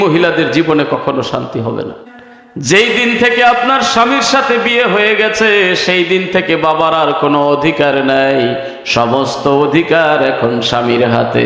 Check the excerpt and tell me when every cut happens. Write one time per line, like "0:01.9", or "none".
0:02.0